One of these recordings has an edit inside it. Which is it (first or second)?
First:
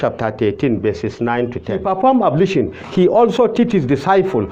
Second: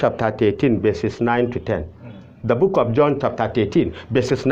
first